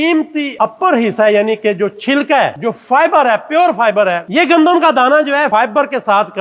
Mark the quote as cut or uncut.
cut